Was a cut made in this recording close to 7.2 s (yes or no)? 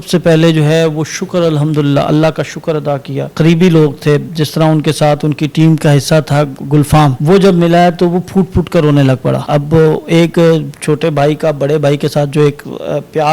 yes